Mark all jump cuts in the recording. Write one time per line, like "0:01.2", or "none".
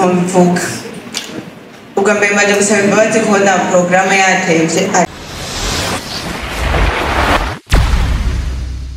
0:05.1